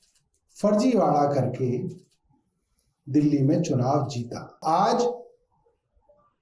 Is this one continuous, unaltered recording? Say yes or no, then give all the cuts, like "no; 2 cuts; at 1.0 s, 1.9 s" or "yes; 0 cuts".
no; 1 cut; at 4.6 s